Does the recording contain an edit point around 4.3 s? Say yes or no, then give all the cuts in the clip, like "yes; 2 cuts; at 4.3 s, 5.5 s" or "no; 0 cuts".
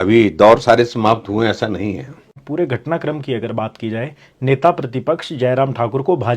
no; 1 cut; at 2.3 s